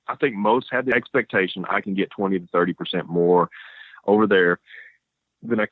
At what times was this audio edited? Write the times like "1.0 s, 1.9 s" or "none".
0.9 s